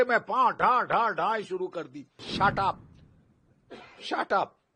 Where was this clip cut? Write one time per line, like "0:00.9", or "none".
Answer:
0:02.3